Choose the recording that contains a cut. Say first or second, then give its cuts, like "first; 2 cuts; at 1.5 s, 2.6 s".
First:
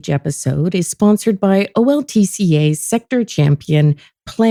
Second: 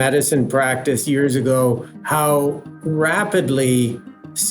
second; 2 cuts; at 1.9 s, 2.7 s